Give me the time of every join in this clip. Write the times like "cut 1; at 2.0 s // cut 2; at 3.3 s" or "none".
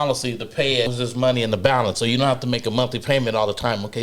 cut 1; at 0.9 s